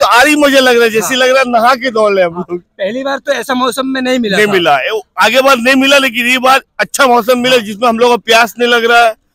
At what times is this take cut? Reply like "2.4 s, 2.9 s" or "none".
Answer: none